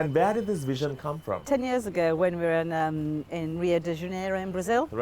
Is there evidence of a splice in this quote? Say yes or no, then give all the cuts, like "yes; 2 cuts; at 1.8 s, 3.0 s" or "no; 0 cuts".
yes; 1 cut; at 1.4 s